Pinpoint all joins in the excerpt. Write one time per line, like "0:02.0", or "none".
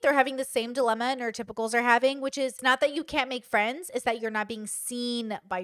0:02.6